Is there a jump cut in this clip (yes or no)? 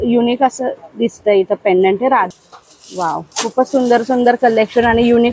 yes